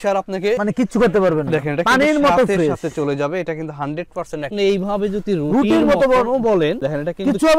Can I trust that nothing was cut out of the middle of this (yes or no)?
no